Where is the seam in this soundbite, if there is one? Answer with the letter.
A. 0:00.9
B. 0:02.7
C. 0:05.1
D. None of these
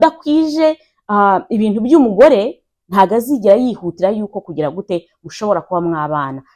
D